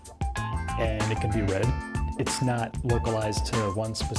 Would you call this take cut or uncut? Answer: uncut